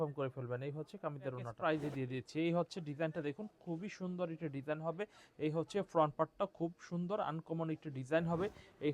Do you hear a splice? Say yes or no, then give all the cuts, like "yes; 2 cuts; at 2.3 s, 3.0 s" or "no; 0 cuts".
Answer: yes; 1 cut; at 1.5 s